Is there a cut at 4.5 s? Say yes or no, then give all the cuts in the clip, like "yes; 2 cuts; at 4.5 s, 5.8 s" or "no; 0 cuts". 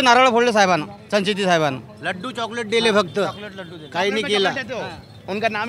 no; 1 cut; at 0.9 s